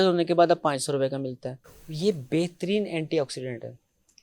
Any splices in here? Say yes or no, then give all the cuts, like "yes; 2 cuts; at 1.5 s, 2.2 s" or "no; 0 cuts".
yes; 1 cut; at 1.5 s